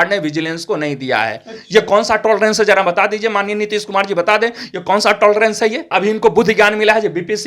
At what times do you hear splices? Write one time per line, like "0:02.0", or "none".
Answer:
0:05.9